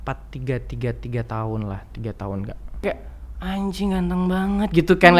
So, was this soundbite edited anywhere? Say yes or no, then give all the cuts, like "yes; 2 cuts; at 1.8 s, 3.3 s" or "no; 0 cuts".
yes; 1 cut; at 2.8 s